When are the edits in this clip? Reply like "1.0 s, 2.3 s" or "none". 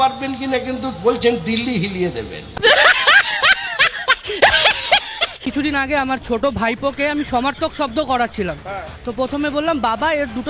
5.4 s